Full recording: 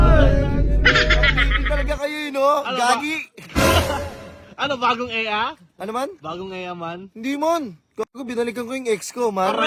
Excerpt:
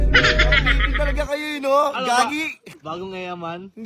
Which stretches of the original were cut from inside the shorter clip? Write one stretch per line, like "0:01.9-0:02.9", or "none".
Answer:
0:03.5-0:06.1